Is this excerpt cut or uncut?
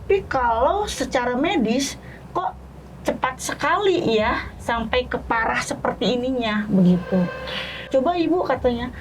cut